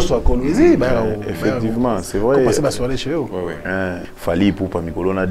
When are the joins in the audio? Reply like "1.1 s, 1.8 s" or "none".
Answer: 4.1 s